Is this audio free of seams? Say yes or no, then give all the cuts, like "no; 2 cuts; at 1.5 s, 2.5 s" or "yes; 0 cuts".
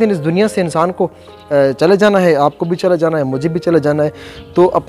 yes; 0 cuts